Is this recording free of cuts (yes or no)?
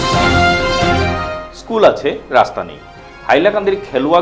yes